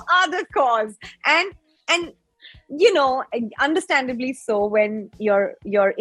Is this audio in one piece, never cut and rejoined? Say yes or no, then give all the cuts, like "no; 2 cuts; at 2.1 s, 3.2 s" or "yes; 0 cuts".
yes; 0 cuts